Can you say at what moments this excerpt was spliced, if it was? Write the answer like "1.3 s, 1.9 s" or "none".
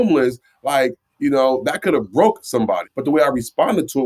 2.8 s